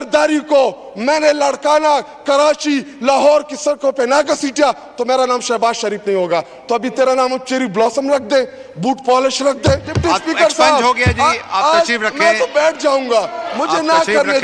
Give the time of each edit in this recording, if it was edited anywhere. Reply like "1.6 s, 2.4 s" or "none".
9.9 s